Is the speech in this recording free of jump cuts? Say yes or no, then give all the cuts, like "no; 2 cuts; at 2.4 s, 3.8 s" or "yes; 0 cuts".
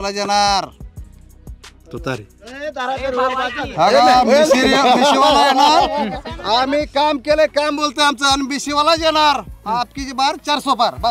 yes; 0 cuts